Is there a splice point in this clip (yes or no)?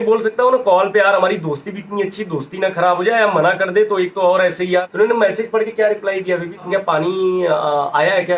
yes